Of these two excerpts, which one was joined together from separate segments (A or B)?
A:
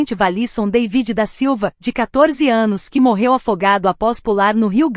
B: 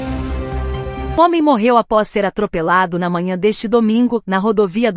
B